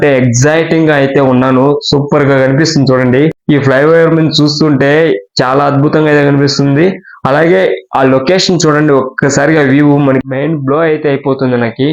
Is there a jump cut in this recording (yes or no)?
no